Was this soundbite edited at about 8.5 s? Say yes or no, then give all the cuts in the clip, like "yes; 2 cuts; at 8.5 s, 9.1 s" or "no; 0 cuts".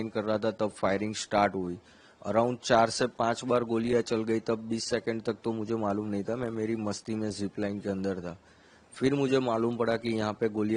no; 0 cuts